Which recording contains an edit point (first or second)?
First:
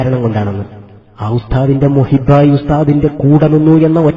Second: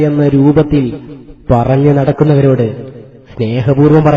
first